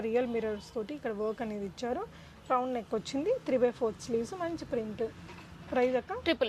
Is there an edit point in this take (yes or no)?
no